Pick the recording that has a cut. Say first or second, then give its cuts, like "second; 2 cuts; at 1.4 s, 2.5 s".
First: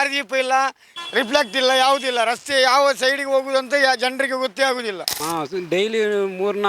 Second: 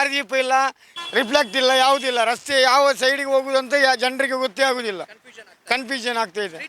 first; 1 cut; at 5.1 s